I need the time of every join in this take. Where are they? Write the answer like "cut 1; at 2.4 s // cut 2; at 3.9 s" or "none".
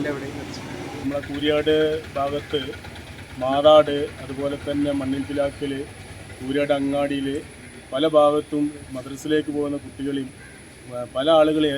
cut 1; at 1.0 s